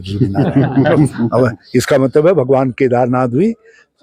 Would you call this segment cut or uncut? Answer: uncut